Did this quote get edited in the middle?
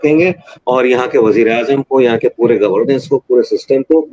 no; 0 cuts

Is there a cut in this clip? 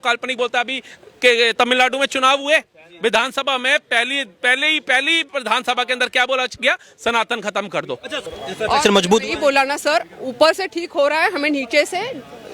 yes; 1 cut; at 8.2 s

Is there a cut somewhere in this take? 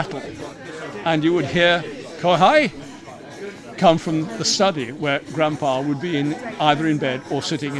no; 0 cuts

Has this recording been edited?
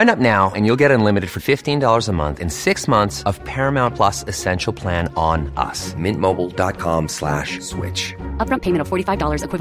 no; 0 cuts

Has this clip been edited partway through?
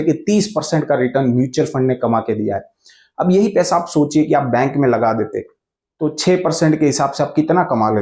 no; 0 cuts

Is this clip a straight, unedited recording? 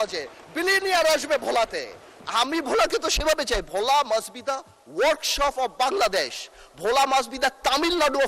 yes; 0 cuts

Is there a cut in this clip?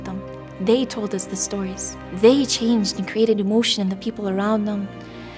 no; 0 cuts

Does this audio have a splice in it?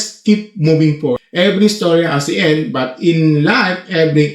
yes; 1 cut; at 1.2 s

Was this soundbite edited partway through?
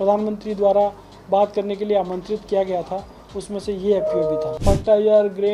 yes; 1 cut; at 4.5 s

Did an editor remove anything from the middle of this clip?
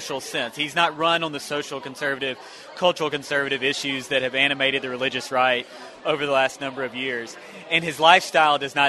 no; 0 cuts

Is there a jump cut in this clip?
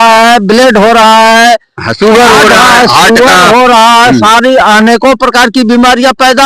no; 0 cuts

